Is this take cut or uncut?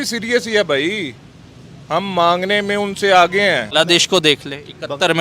cut